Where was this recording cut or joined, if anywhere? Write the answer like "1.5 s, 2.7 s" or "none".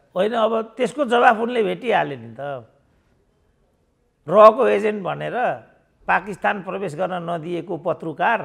none